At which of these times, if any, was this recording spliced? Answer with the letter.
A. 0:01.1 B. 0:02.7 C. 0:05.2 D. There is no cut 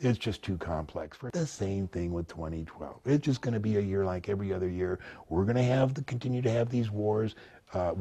A